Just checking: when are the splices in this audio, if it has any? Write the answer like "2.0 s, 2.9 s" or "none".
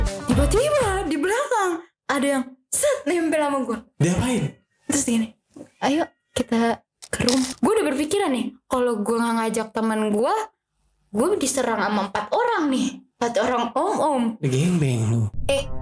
7.5 s